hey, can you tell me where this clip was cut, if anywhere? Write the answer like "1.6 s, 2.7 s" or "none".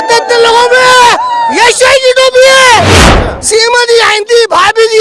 3.0 s